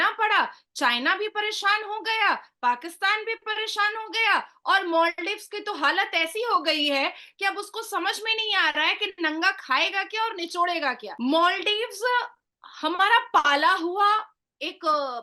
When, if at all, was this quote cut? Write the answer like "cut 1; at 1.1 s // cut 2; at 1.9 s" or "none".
cut 1; at 11.1 s